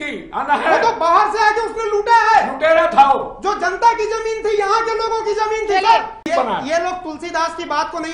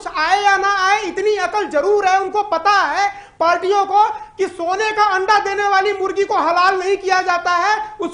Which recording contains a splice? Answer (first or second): first